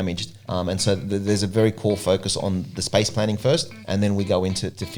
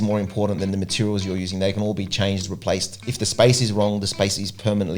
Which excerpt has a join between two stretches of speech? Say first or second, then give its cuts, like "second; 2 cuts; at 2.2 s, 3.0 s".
second; 1 cut; at 3.0 s